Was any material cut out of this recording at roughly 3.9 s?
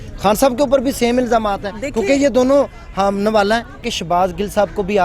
yes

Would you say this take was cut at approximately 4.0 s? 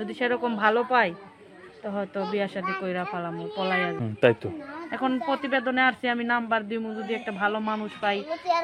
yes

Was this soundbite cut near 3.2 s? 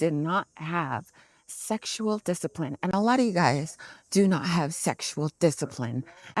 no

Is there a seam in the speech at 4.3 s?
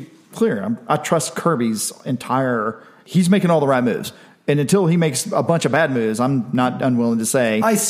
no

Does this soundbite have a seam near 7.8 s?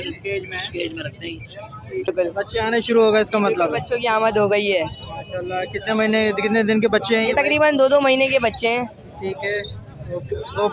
no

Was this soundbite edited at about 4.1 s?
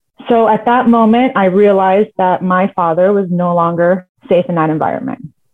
yes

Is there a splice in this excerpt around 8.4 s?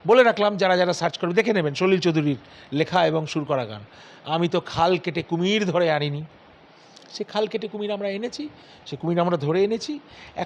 no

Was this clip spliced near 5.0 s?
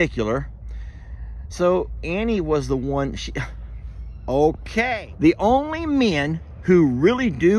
yes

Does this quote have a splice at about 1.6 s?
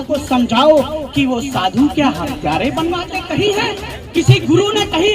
no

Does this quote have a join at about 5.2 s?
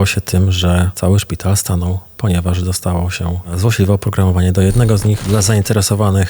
yes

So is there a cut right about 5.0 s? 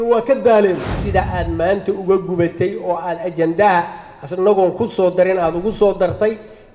no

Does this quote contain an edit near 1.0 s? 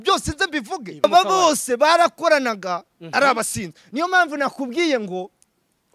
yes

